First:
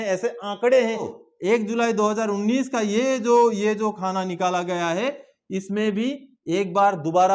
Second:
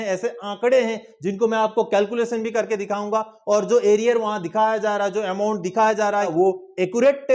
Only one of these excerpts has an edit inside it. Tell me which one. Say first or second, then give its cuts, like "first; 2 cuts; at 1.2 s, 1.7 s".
first; 1 cut; at 1.1 s